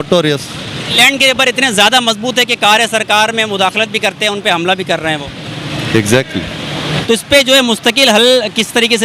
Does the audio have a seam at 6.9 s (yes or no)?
yes